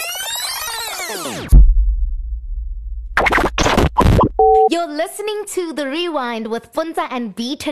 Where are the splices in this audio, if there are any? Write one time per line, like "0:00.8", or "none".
none